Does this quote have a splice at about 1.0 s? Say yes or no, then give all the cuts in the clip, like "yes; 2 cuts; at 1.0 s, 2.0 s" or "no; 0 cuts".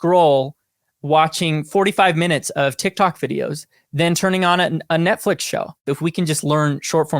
no; 1 cut; at 5.8 s